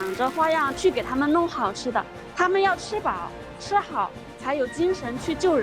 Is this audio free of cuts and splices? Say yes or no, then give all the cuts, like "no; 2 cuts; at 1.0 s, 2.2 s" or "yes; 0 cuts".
yes; 0 cuts